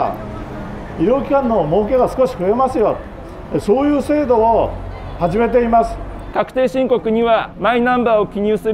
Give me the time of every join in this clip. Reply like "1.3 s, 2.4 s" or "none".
6.3 s, 7.5 s